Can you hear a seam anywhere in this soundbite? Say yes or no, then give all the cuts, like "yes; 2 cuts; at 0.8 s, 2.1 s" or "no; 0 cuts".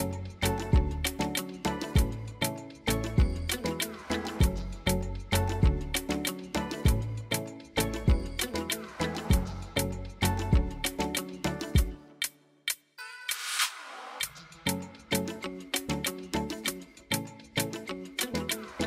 no; 0 cuts